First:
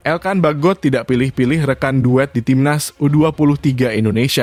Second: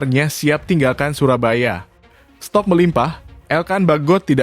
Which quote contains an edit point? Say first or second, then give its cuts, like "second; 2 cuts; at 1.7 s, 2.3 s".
second; 1 cut; at 2.3 s